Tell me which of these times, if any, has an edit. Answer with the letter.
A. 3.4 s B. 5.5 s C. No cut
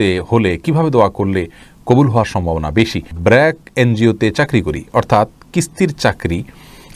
A